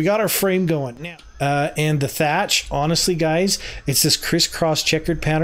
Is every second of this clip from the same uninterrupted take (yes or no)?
no